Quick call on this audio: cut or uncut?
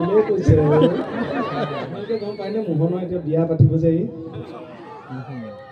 cut